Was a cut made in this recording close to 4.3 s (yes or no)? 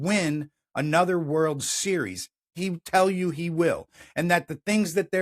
no